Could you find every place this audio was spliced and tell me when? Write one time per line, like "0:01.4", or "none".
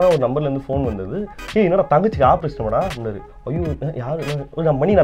none